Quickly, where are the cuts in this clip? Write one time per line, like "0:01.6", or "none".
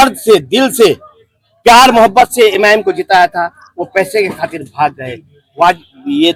none